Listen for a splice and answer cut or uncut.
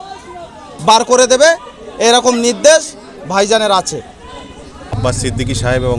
cut